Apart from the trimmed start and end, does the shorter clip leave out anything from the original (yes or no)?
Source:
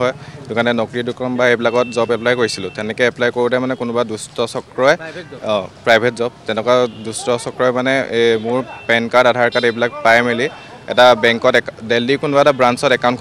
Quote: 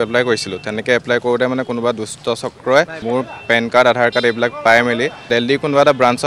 yes